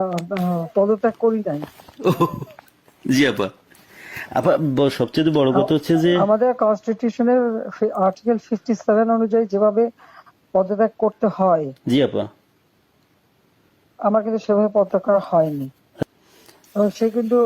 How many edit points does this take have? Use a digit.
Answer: 1